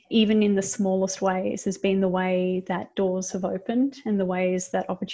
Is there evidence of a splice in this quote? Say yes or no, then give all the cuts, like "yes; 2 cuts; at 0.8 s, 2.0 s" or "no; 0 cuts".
no; 0 cuts